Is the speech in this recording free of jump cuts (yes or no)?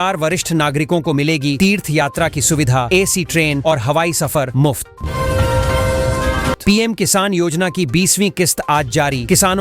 no